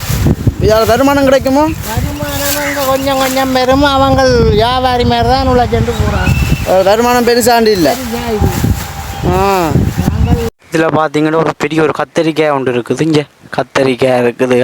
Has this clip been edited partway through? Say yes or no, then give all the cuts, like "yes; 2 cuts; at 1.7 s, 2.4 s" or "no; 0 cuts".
yes; 1 cut; at 10.6 s